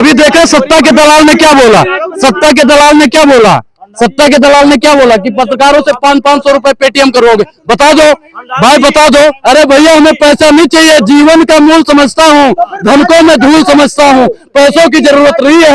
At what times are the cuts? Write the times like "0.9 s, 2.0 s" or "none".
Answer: none